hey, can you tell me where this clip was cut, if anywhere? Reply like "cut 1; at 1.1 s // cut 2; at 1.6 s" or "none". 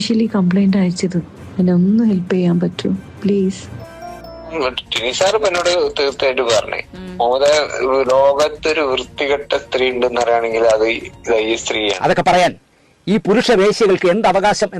cut 1; at 4.5 s // cut 2; at 12.0 s